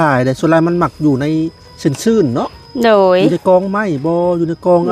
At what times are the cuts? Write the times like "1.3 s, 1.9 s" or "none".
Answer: none